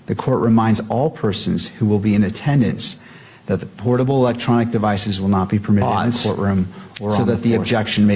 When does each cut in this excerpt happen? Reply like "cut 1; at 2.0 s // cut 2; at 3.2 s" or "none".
cut 1; at 7.2 s

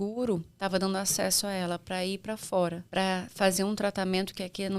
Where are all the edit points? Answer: cut 1; at 2.8 s

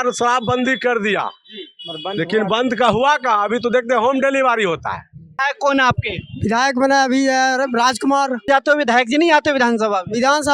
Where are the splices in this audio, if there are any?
cut 1; at 5.5 s // cut 2; at 8.5 s

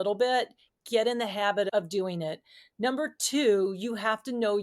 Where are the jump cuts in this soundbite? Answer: cut 1; at 1.7 s

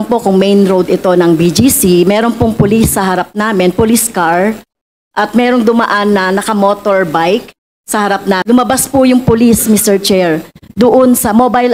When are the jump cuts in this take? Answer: cut 1; at 8.4 s

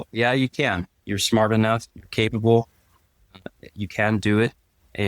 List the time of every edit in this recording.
cut 1; at 1.0 s

